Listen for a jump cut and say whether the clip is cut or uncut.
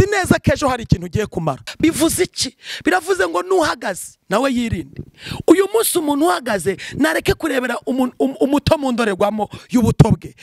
cut